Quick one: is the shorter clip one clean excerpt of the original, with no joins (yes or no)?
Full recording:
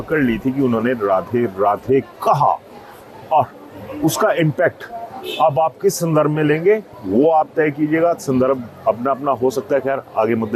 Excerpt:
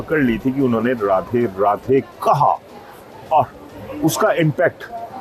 yes